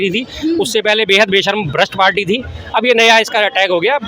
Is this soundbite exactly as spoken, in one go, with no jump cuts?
yes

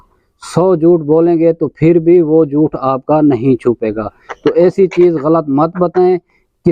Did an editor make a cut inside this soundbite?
no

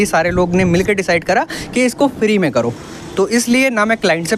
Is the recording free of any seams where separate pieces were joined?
yes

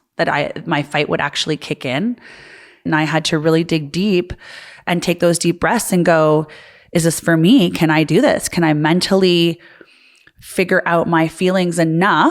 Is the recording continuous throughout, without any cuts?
no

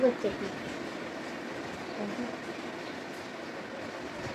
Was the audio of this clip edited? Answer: no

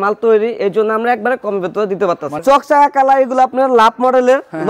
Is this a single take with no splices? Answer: no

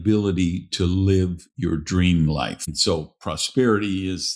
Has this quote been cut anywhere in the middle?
yes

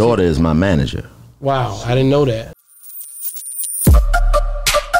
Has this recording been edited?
yes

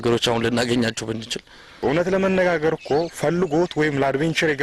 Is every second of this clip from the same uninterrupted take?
no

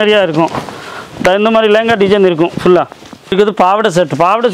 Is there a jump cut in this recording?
yes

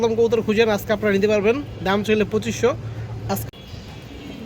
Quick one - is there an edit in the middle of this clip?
yes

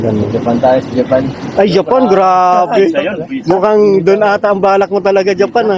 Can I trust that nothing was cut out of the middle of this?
yes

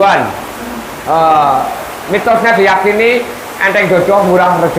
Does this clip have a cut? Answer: no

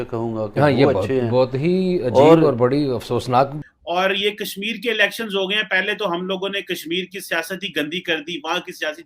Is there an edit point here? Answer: yes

